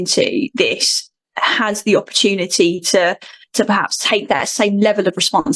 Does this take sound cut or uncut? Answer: uncut